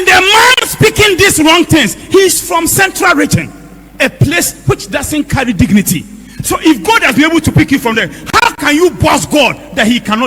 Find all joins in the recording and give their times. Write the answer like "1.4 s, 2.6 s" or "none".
none